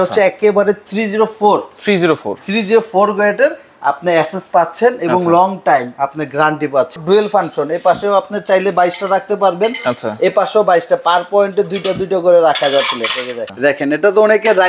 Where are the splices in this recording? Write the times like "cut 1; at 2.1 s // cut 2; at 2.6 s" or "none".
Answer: cut 1; at 7.0 s // cut 2; at 13.4 s